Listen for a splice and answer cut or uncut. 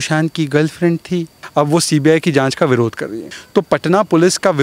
cut